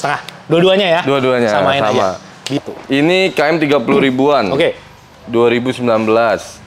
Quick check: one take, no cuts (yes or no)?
no